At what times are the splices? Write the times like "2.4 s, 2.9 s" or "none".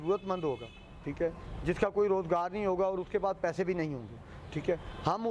none